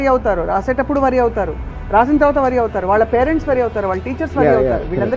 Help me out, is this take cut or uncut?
uncut